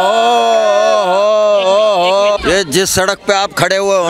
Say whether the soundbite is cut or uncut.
cut